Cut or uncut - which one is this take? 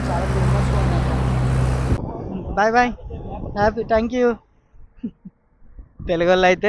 cut